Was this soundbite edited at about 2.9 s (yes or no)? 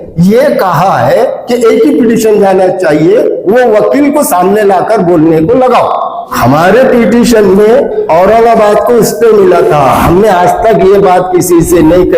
no